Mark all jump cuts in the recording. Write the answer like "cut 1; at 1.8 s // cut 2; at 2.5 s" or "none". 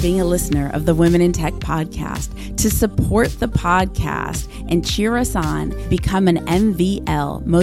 none